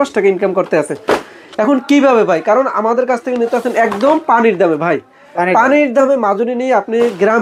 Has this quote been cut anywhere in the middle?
no; 0 cuts

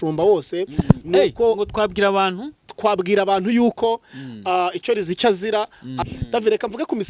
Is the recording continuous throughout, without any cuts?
no; 1 cut; at 6.0 s

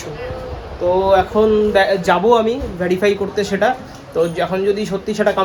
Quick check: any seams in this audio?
no; 0 cuts

